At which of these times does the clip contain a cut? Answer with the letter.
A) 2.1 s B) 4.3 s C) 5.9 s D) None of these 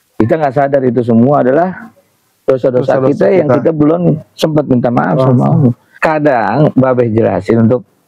C